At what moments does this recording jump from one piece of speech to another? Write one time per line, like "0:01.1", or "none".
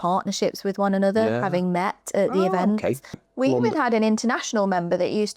0:03.3

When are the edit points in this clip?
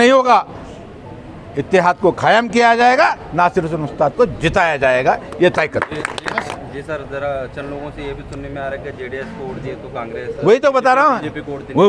0:06.5

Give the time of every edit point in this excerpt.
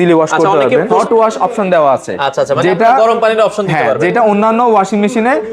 0:00.9

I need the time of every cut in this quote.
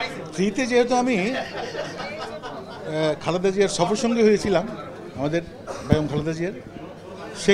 none

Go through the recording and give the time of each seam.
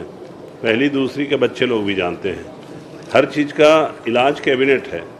none

